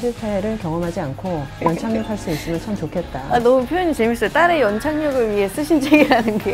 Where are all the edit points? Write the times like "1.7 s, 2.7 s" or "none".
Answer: 1.6 s